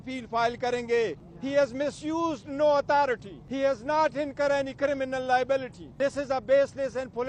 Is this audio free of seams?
no; 3 cuts; at 1.3 s, 3.4 s, 5.8 s

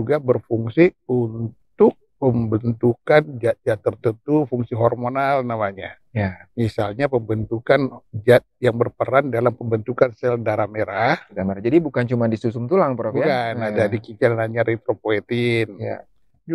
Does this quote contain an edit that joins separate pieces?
no; 0 cuts

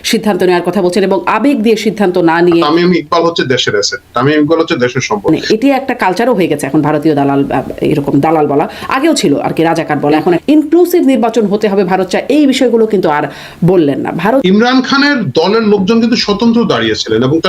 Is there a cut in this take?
yes; 4 cuts; at 2.6 s, 5.3 s, 10.4 s, 14.4 s

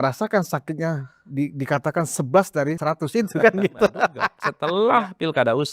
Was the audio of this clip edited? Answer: yes; 1 cut; at 4.3 s

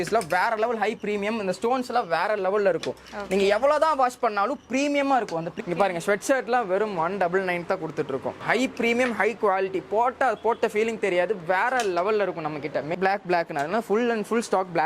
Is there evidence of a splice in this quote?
yes; 3 cuts; at 5.5 s, 8.4 s, 12.9 s

